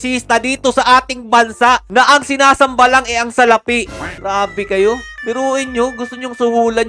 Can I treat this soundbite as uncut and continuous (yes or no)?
yes